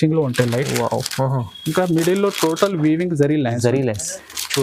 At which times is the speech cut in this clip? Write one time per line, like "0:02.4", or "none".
none